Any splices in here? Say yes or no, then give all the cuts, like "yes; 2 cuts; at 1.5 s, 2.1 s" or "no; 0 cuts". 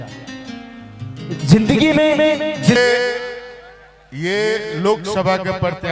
yes; 1 cut; at 2.8 s